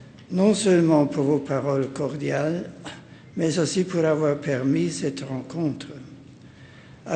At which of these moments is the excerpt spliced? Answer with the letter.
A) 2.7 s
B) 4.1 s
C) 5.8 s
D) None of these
B